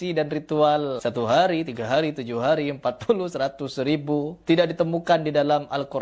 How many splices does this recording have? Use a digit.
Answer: 2